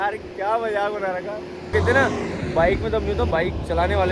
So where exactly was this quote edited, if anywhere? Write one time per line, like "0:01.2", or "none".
0:01.7
0:03.3